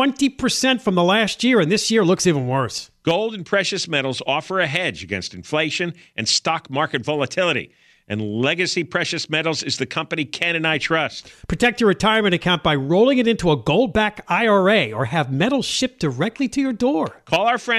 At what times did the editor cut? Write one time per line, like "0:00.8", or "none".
none